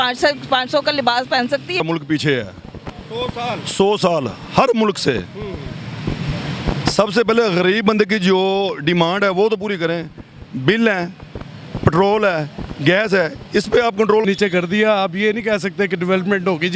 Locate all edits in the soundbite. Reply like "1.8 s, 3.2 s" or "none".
1.8 s, 14.2 s